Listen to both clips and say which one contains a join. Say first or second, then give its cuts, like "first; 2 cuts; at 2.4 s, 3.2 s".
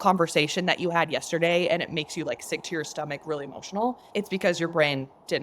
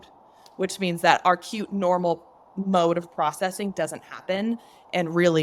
first; 1 cut; at 4.0 s